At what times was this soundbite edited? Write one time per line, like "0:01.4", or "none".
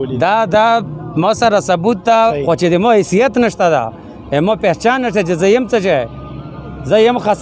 0:02.2